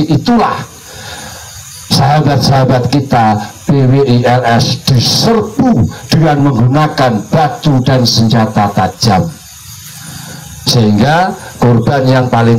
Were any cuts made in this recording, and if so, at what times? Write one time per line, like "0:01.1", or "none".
none